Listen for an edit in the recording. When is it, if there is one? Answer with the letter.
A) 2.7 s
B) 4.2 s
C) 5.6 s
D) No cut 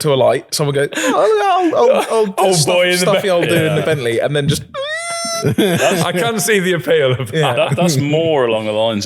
D